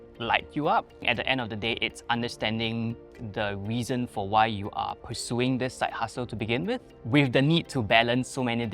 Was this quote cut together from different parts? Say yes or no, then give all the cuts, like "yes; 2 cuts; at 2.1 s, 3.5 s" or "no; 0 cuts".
yes; 2 cuts; at 1.0 s, 6.9 s